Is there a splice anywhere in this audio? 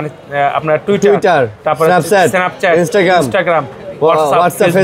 no; 0 cuts

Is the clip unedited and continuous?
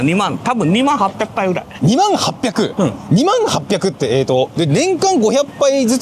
yes; 0 cuts

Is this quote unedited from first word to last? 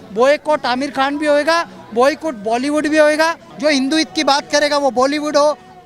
no; 1 cut; at 3.5 s

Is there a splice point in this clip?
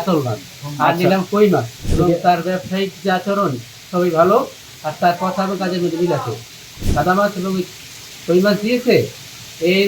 yes; 2 cuts; at 1.8 s, 6.8 s

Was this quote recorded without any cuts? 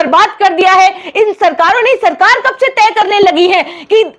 yes; 0 cuts

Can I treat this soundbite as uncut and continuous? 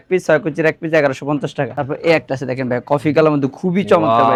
yes; 0 cuts

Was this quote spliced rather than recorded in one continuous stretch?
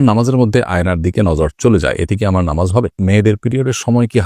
yes; 1 cut; at 3.0 s

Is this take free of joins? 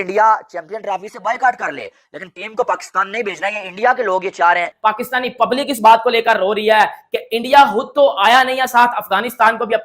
no; 1 cut; at 4.7 s

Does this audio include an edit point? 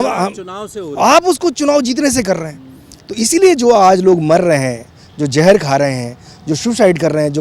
no; 0 cuts

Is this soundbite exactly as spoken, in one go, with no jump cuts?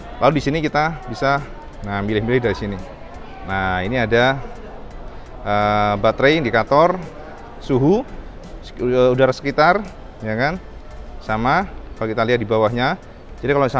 yes; 0 cuts

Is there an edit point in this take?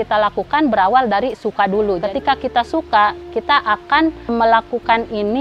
yes; 2 cuts; at 1.9 s, 4.3 s

